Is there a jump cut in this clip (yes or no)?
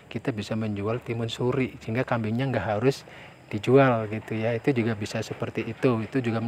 no